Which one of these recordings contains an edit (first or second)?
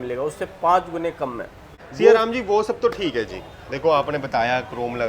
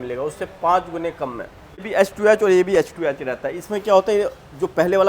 second